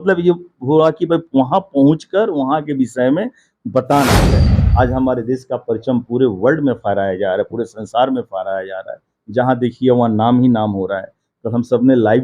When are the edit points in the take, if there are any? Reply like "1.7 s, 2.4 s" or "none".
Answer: 4.3 s

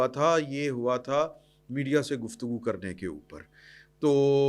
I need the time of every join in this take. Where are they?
none

